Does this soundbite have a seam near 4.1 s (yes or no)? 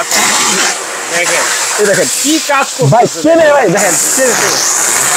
no